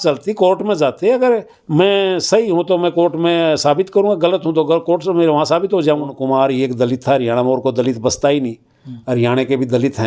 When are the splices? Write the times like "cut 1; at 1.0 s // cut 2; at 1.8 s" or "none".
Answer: cut 1; at 6.2 s